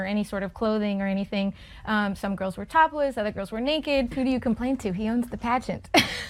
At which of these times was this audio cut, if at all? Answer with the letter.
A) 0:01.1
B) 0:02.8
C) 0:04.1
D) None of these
C